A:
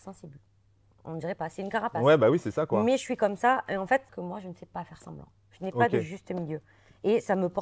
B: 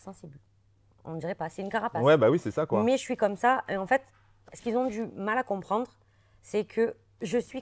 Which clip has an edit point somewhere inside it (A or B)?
A